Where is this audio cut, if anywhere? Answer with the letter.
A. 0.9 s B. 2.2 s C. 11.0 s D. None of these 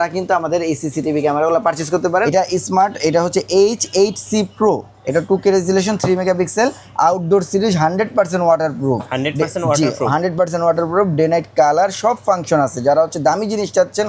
B